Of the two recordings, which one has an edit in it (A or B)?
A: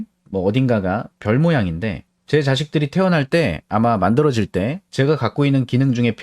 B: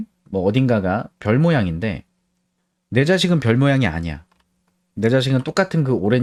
A